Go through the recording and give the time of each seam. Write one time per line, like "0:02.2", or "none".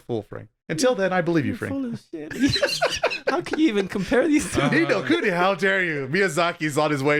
none